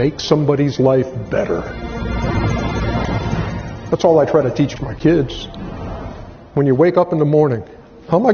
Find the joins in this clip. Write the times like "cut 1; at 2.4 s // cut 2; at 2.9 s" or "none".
cut 1; at 4.8 s